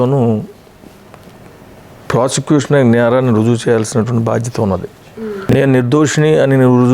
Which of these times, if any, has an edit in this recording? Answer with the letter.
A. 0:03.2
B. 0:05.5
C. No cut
B